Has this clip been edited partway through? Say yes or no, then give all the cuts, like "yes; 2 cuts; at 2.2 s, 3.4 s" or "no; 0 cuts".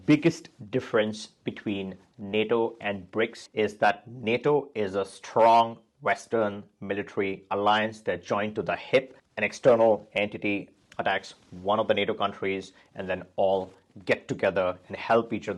no; 0 cuts